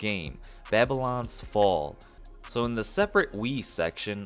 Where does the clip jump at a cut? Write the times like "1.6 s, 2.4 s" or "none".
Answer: 2.1 s